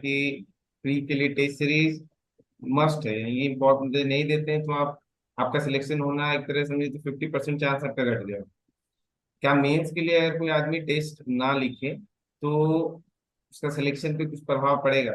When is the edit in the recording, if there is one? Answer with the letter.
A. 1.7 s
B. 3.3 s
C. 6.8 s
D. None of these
D